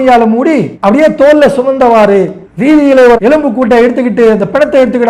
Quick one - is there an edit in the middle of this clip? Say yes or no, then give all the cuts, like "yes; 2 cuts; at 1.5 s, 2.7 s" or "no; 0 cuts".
yes; 1 cut; at 3.2 s